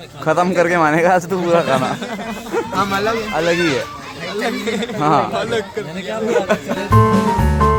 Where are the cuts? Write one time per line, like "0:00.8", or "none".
none